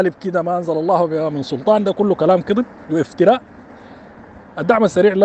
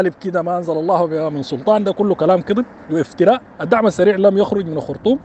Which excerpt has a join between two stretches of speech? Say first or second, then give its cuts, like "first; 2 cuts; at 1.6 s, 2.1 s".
second; 1 cut; at 3.5 s